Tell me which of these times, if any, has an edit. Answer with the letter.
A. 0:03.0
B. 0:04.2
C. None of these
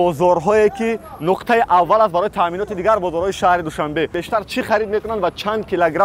B